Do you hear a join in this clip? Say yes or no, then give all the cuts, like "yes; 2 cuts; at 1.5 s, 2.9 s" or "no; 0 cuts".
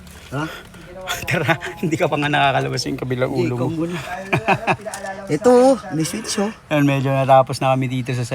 yes; 1 cut; at 4.1 s